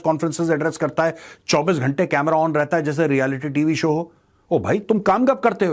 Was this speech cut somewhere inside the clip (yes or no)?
no